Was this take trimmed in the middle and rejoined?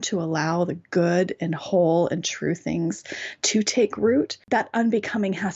yes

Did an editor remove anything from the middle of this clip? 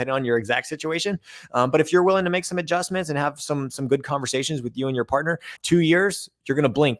no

